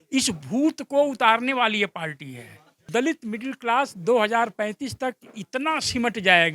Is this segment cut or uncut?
cut